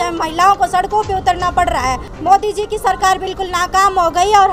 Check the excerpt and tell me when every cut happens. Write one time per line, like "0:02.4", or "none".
0:02.1